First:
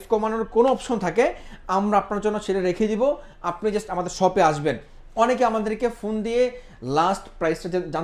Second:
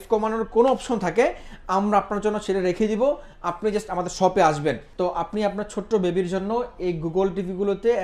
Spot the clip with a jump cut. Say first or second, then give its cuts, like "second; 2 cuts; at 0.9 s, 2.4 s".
second; 1 cut; at 4.9 s